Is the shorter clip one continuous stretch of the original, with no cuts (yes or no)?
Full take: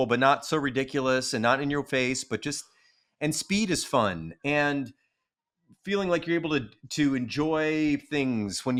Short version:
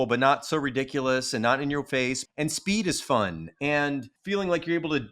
no